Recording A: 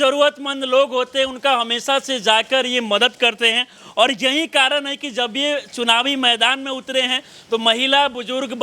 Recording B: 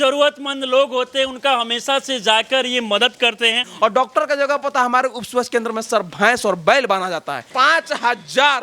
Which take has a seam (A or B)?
B